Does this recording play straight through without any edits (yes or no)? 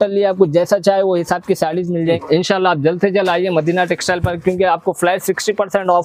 no